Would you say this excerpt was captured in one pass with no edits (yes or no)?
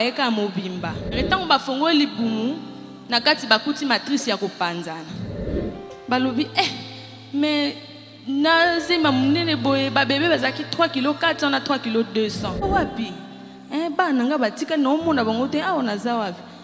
no